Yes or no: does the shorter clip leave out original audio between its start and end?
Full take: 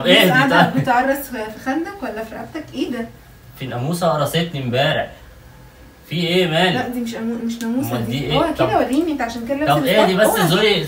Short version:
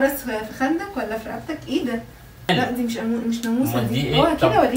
yes